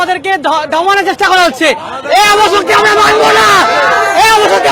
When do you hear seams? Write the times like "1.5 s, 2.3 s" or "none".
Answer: none